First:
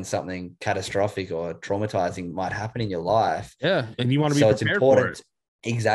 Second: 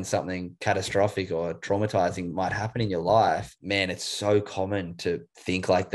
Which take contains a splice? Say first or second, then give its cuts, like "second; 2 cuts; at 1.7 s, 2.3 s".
second; 1 cut; at 3.5 s